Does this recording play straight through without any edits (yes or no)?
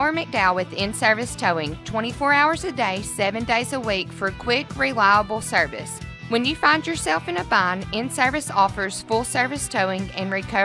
yes